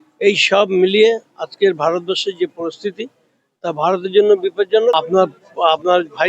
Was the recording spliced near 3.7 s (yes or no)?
no